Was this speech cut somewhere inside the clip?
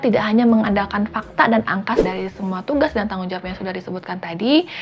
yes; 1 cut; at 2.0 s

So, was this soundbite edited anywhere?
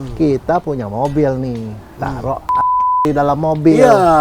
no; 0 cuts

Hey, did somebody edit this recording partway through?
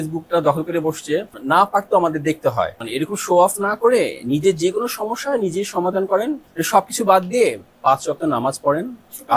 yes; 3 cuts; at 1.3 s, 2.8 s, 6.5 s

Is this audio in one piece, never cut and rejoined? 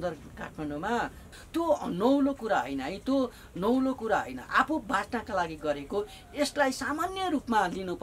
no; 1 cut; at 1.2 s

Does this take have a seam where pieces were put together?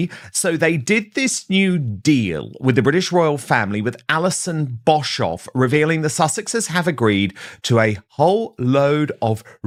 no; 0 cuts

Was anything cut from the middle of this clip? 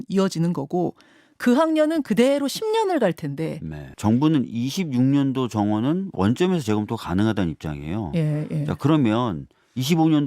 yes; 1 cut; at 3.8 s

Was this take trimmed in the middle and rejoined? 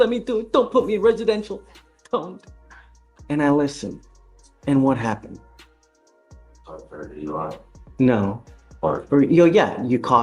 no; 0 cuts

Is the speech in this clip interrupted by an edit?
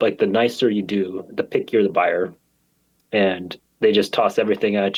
no; 0 cuts

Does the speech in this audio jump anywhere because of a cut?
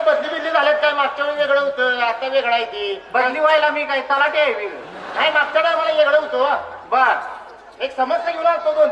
no; 0 cuts

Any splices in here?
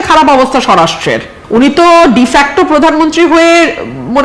yes; 1 cut; at 1.3 s

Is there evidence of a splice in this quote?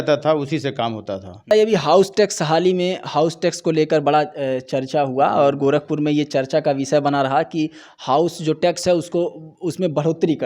yes; 1 cut; at 1.5 s

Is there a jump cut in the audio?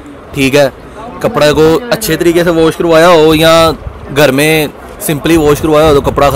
no; 0 cuts

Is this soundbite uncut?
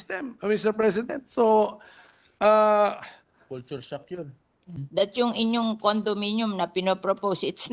no; 1 cut; at 4.8 s

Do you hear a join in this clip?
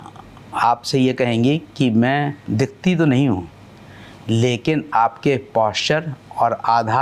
no; 0 cuts

